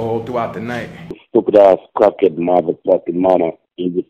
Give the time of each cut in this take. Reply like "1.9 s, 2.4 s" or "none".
1.2 s